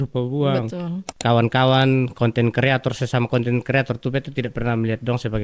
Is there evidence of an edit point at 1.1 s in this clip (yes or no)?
yes